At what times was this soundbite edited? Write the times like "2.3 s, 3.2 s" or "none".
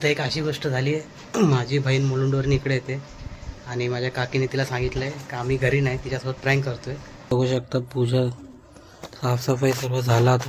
7.3 s